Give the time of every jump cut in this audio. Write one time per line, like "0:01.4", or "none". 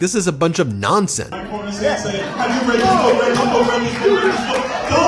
0:01.2